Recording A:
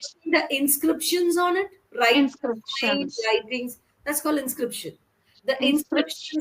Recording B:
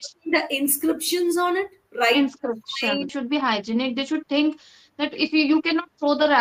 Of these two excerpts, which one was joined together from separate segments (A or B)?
B